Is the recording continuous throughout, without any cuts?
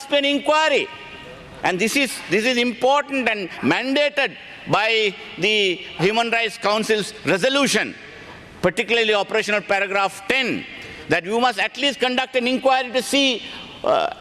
yes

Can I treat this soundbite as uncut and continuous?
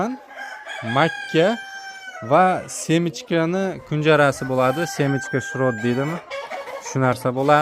yes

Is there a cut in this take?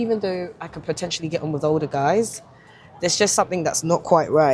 no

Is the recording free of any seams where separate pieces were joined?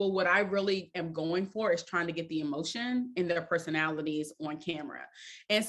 yes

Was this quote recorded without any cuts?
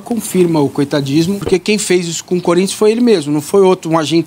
no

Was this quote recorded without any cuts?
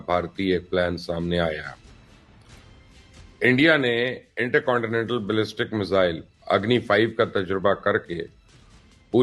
yes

